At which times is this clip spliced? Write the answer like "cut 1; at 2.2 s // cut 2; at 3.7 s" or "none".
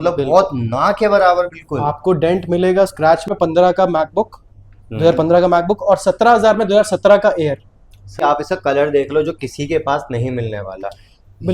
cut 1; at 3.3 s // cut 2; at 8.1 s

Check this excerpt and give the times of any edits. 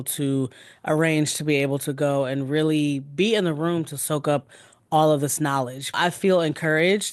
cut 1; at 5.9 s

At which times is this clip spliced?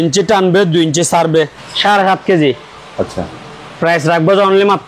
cut 1; at 1.6 s

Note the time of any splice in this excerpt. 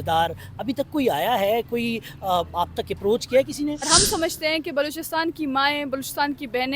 cut 1; at 3.9 s

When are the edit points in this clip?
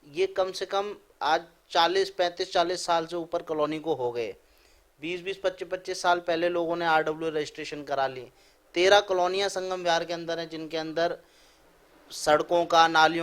none

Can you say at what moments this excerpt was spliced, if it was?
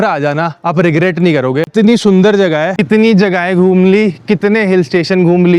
cut 1; at 1.7 s // cut 2; at 2.8 s

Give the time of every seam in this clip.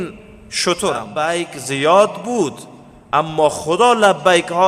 cut 1; at 1.1 s

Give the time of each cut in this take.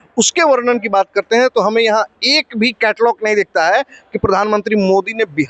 none

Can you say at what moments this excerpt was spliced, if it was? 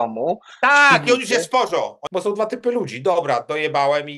cut 1; at 2.0 s

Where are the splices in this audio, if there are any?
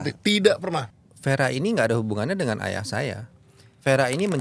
cut 1; at 0.9 s

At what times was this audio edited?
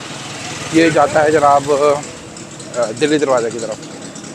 none

